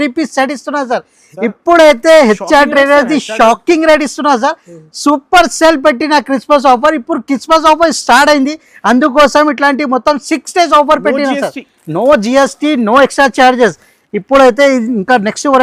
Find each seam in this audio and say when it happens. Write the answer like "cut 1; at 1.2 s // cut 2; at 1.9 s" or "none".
none